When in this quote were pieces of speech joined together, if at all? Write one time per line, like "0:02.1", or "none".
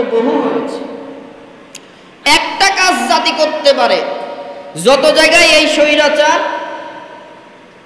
none